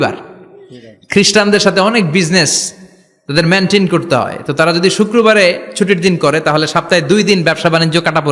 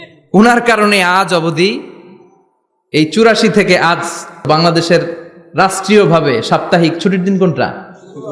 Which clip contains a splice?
second; 1 cut; at 4.4 s

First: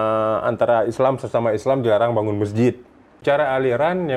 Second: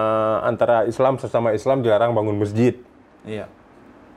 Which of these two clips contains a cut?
first; 1 cut; at 3.2 s

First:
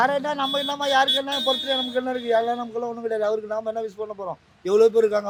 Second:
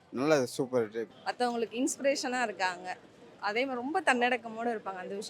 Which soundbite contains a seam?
second; 1 cut; at 1.2 s

